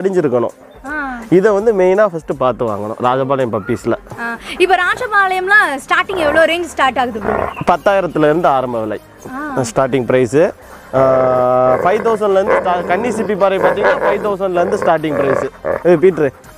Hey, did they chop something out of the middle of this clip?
no; 0 cuts

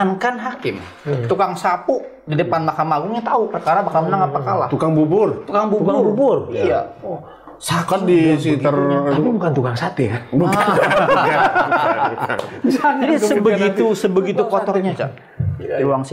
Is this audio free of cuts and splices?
yes; 0 cuts

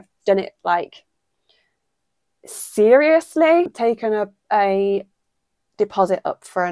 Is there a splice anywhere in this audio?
yes; 1 cut; at 3.7 s

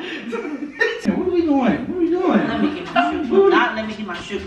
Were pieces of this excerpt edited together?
yes; 1 cut; at 1.0 s

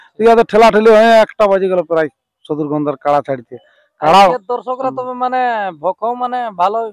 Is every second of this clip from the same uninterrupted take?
yes; 0 cuts

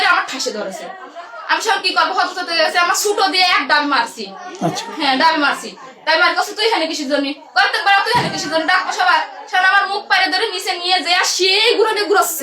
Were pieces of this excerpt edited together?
no; 0 cuts

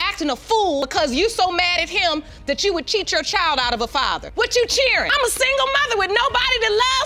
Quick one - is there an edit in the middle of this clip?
no; 0 cuts

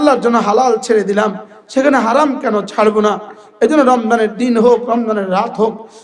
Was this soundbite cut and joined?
no; 0 cuts

